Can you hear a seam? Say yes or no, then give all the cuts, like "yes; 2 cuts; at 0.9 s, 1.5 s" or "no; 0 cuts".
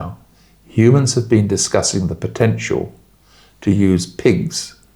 no; 0 cuts